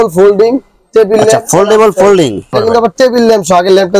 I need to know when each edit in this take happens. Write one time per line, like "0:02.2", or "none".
0:02.5

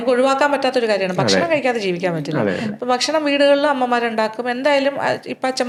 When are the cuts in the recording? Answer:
none

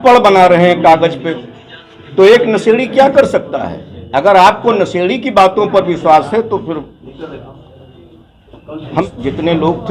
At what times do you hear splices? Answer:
0:09.0

